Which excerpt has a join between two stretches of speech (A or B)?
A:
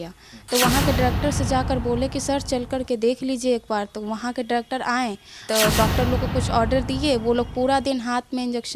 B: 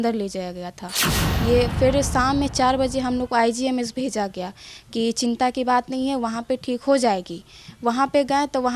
A